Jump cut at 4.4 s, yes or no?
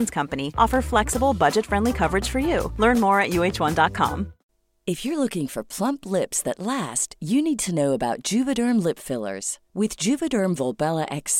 yes